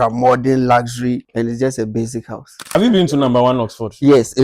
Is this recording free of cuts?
no; 2 cuts; at 1.3 s, 2.7 s

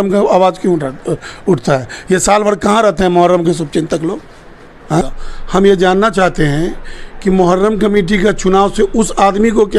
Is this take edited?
yes; 1 cut; at 5.2 s

